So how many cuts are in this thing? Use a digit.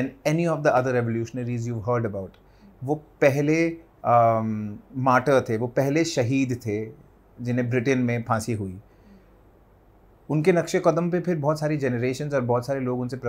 0